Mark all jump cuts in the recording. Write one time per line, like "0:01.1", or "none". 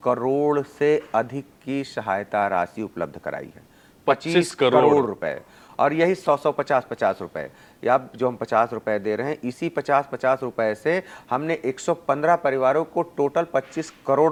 none